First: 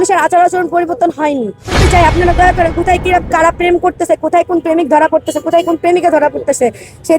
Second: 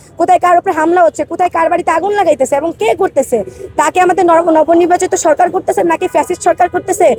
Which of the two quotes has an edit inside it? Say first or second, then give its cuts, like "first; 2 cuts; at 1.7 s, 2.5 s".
first; 1 cut; at 1.7 s